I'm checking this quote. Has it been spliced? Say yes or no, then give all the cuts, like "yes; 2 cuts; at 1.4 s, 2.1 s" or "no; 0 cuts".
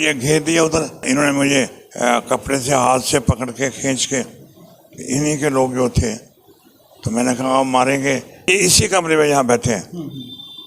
yes; 2 cuts; at 1.0 s, 8.5 s